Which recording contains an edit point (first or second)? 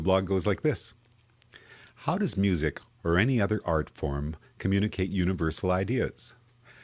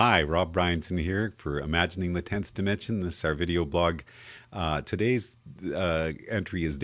second